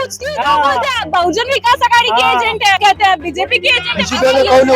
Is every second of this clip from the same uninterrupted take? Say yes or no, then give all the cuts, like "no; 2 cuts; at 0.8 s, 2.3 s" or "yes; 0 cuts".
no; 1 cut; at 2.8 s